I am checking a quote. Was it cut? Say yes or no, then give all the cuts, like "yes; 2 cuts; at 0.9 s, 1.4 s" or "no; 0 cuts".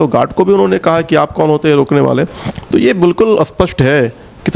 no; 0 cuts